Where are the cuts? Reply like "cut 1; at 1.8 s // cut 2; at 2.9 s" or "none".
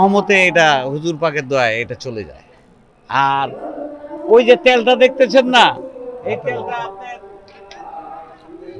none